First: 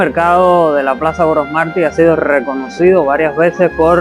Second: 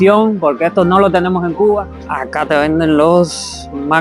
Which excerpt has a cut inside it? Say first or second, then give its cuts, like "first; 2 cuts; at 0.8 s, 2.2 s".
second; 1 cut; at 2.0 s